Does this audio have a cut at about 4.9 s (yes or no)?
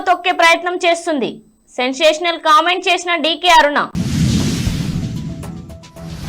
yes